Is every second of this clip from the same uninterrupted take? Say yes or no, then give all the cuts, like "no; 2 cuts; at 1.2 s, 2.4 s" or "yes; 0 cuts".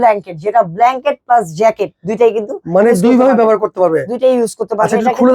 yes; 0 cuts